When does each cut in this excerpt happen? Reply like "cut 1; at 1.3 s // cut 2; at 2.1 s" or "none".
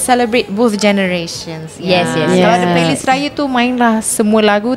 none